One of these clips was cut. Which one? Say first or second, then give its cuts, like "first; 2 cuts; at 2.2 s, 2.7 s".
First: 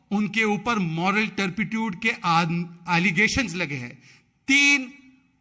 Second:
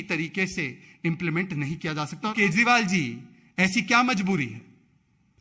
second; 1 cut; at 2.3 s